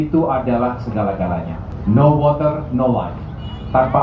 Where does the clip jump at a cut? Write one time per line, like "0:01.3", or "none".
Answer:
0:01.6